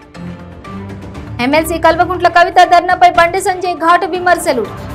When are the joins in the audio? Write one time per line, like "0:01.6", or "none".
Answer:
none